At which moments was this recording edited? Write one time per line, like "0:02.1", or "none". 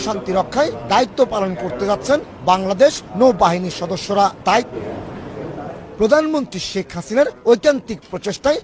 0:04.7